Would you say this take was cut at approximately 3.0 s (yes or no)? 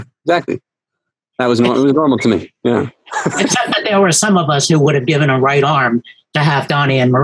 no